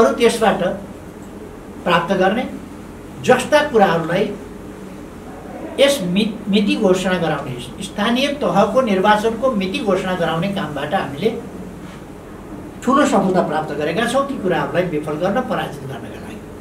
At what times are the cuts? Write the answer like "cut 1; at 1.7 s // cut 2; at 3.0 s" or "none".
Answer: none